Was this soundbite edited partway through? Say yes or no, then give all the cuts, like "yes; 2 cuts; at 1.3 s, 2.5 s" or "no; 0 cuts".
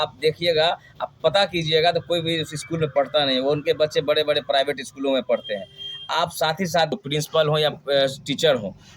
yes; 1 cut; at 6.9 s